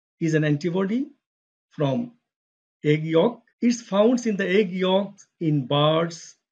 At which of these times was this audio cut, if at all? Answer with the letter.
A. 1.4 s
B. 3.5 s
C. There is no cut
B